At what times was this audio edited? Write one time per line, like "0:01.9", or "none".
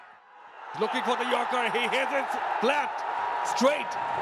none